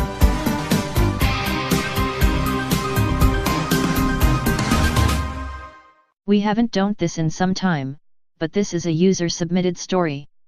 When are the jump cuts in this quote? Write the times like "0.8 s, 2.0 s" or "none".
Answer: 2.6 s